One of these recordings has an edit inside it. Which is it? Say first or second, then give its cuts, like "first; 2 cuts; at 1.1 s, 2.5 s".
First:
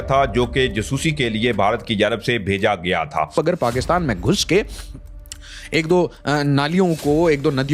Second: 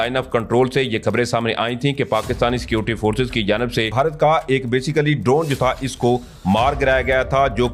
first; 1 cut; at 3.3 s